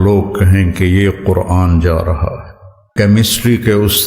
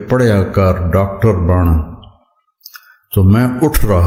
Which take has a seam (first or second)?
first